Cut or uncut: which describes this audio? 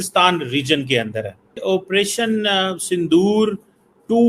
cut